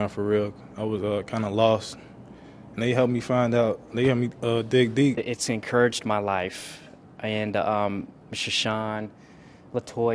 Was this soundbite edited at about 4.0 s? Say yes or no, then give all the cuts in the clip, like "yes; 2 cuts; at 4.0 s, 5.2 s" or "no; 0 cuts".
no; 1 cut; at 5.2 s